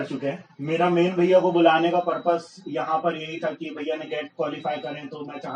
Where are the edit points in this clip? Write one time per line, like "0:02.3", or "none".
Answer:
none